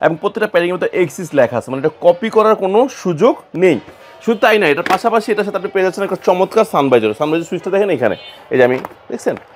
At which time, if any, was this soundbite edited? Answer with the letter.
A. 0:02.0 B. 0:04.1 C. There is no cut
C